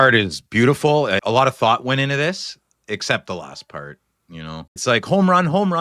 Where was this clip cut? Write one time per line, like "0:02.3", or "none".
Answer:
0:01.2
0:04.7